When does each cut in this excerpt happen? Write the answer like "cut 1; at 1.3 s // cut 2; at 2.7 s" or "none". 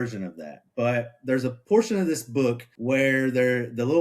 cut 1; at 1.6 s // cut 2; at 2.7 s